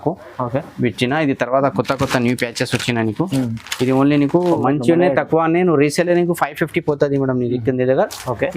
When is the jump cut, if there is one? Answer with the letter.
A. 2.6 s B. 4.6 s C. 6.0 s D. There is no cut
B